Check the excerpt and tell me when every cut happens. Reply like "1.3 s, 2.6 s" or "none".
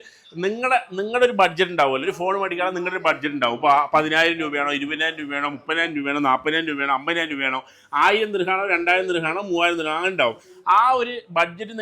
none